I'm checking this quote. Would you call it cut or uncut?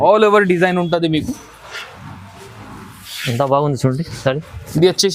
uncut